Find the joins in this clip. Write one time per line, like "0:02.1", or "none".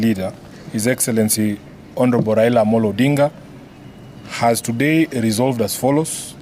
none